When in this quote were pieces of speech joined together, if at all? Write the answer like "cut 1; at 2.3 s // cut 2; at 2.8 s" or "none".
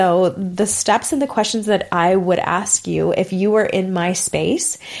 none